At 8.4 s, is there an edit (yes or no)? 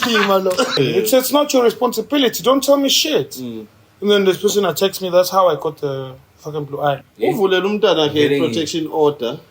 no